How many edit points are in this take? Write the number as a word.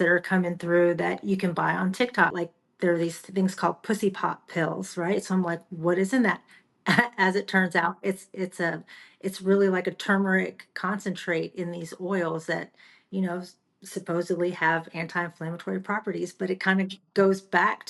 one